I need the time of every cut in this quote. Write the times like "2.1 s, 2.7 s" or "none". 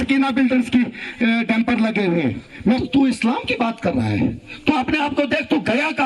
2.8 s